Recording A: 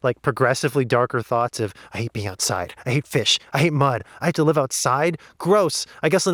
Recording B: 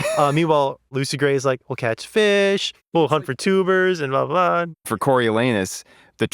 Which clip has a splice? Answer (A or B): B